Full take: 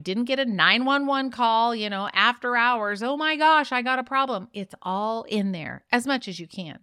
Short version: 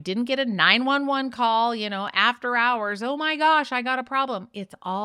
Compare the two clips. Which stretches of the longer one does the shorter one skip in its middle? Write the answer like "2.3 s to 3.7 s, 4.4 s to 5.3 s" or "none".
none